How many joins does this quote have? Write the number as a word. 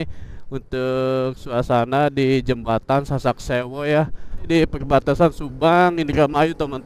one